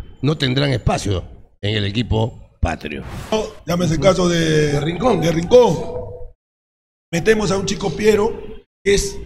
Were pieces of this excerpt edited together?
yes; 1 cut; at 3.3 s

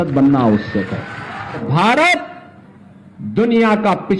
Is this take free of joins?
no; 1 cut; at 1.6 s

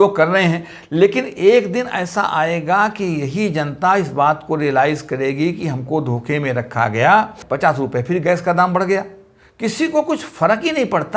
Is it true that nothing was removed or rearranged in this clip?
no; 1 cut; at 7.4 s

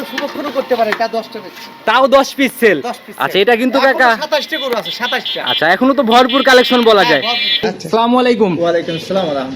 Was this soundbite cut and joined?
yes; 1 cut; at 7.8 s

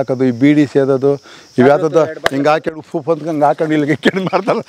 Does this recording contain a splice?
no; 0 cuts

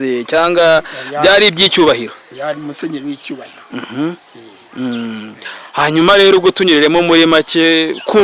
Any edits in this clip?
no; 0 cuts

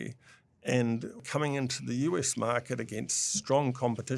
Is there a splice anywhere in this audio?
yes; 1 cut; at 1.2 s

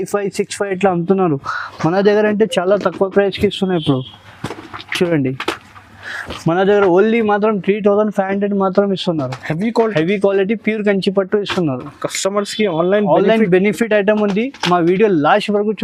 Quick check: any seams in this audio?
no; 0 cuts

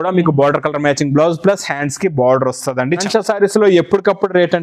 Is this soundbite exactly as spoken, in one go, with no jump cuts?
no; 1 cut; at 3.1 s

